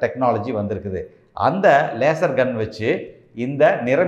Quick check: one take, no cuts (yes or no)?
yes